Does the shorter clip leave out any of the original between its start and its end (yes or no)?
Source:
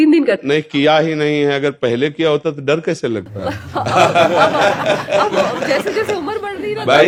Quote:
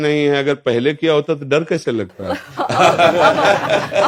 no